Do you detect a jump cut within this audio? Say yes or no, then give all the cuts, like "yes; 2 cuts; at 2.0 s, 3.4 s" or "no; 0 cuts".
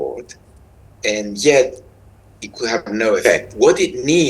yes; 1 cut; at 3.4 s